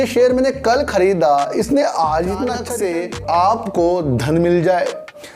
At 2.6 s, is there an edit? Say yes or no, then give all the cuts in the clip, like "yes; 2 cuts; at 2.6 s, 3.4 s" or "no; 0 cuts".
yes; 1 cut; at 2.6 s